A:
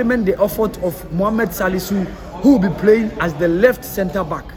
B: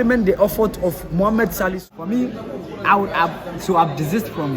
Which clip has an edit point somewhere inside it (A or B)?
B